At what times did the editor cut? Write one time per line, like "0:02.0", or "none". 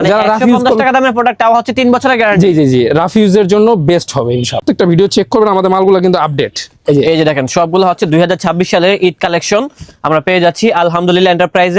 0:04.6

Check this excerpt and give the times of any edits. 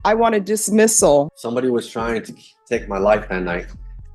0:01.3

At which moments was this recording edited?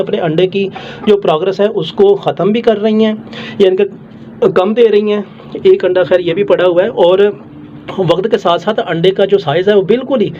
none

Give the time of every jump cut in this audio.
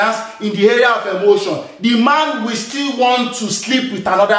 none

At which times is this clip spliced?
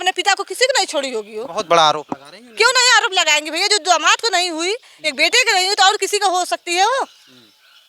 none

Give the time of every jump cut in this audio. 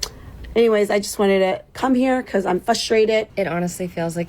0:03.3

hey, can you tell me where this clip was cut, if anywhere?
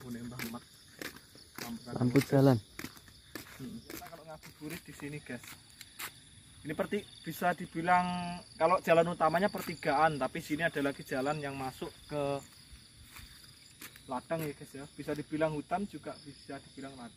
0:04.4

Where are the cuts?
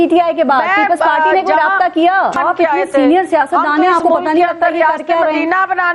0:02.3

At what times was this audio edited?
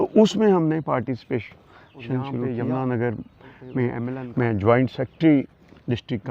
0:02.4
0:04.2

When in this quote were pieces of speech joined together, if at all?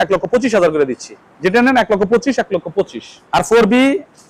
0:03.3

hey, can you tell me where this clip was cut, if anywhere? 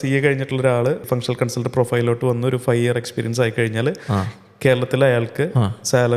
0:01.0

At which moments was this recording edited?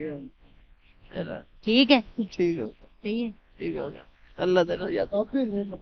none

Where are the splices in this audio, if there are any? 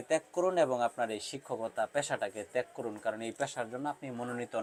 none

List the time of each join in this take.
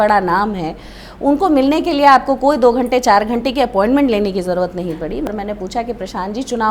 0:05.3

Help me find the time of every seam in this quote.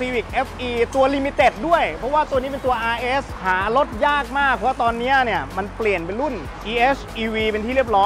none

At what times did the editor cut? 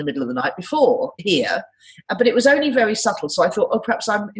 0:01.1

